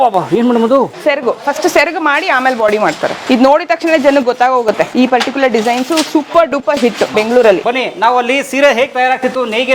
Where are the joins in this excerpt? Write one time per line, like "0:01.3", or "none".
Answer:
0:00.9
0:03.2
0:04.9
0:07.2